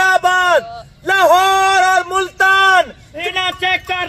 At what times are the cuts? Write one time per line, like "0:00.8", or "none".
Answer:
0:03.1